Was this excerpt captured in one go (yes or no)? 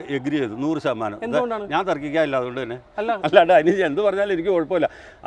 yes